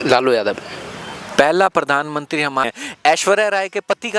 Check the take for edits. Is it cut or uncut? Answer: cut